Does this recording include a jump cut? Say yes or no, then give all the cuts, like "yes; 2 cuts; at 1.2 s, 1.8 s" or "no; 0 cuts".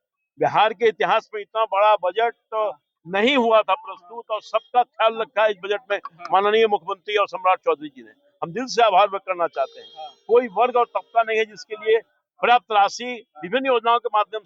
no; 0 cuts